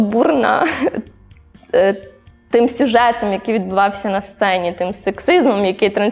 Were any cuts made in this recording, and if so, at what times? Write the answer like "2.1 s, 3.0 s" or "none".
none